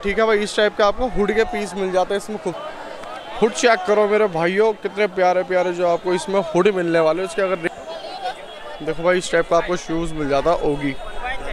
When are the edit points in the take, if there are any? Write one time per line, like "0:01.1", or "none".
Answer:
0:02.6
0:07.6